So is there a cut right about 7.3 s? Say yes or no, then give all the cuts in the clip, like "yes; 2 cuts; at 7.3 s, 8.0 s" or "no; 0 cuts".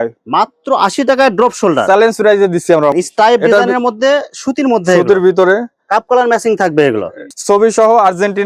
yes; 2 cuts; at 2.9 s, 7.3 s